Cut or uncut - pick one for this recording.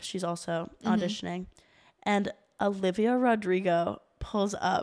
uncut